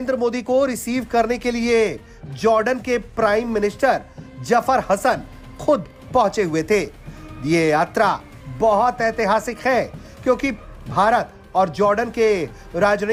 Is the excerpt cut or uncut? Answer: uncut